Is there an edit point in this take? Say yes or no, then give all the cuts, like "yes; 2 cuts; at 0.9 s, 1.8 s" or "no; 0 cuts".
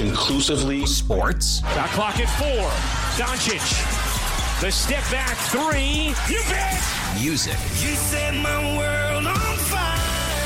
no; 0 cuts